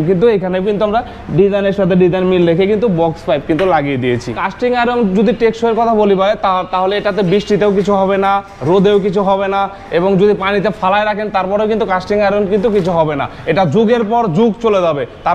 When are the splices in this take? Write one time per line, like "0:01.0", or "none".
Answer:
0:04.4